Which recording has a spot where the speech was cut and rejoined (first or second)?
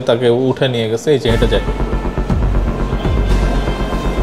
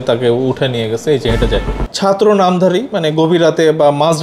second